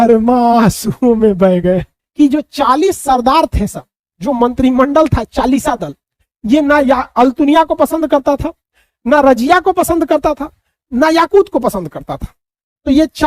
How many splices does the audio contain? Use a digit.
1